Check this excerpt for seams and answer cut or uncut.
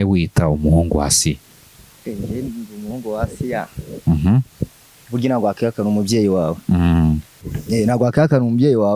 uncut